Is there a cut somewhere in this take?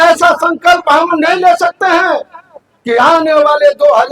no; 0 cuts

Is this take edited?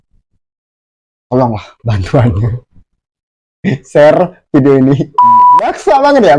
no; 0 cuts

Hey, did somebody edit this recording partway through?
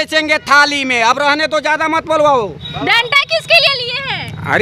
no; 0 cuts

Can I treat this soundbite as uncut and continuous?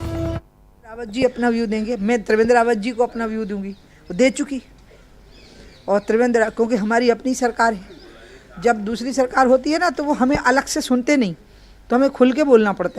no; 1 cut; at 1.0 s

